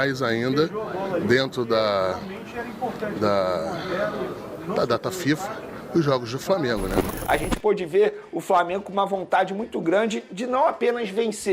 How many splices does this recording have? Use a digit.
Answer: 1